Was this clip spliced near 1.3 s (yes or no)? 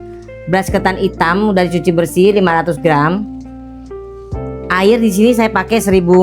no